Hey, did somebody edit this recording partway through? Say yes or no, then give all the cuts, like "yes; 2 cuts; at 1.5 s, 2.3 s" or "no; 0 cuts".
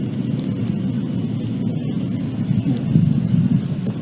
no; 0 cuts